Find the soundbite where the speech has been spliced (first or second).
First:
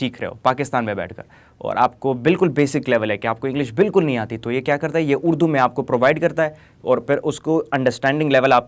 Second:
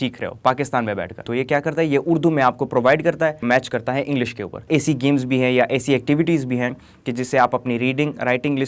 second